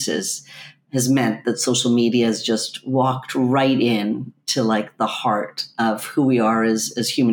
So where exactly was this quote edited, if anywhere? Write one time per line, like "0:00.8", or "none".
none